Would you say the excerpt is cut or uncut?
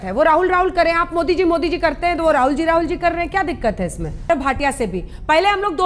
cut